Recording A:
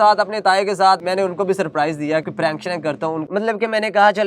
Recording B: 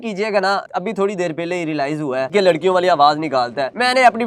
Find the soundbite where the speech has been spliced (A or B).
A